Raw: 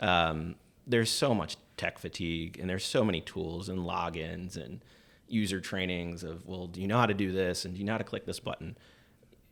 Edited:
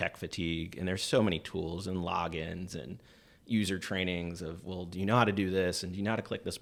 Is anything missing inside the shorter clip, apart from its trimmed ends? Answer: no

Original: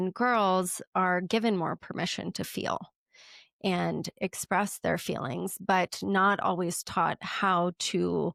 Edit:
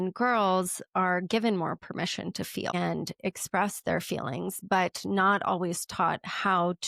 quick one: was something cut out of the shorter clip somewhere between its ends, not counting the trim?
yes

